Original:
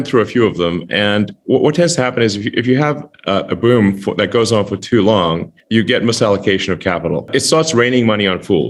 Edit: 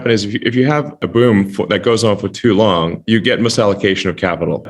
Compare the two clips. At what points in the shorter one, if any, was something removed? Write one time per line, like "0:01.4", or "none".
0:01.0
0:03.0